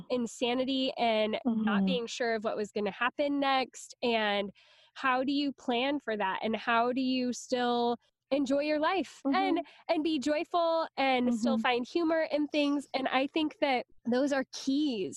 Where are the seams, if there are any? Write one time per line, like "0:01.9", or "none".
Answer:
0:09.2